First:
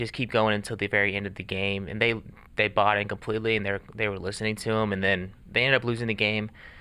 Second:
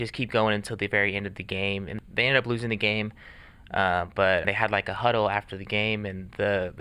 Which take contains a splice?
second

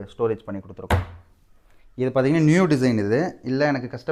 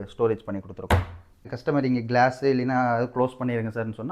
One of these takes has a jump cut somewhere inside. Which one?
second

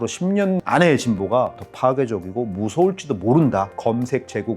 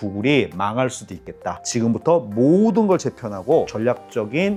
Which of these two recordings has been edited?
first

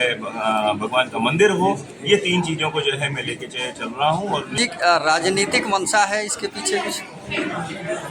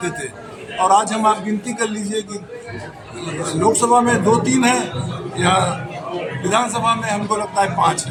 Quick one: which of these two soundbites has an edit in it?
first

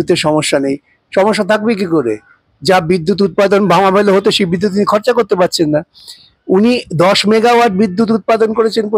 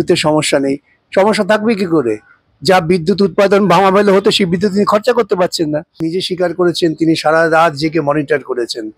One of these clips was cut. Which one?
second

